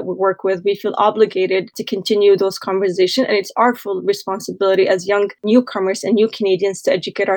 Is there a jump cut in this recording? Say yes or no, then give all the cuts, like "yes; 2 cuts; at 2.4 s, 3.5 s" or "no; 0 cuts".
no; 0 cuts